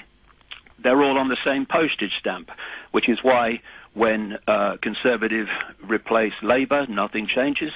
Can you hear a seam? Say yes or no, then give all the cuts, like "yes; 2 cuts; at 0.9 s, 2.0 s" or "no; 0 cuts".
no; 0 cuts